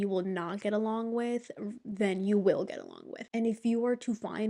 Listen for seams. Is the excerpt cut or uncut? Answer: uncut